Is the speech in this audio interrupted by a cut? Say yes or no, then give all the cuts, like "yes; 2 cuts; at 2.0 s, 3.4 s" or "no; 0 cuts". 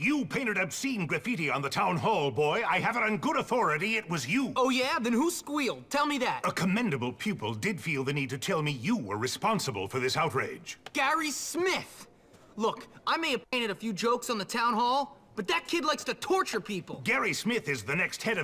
no; 0 cuts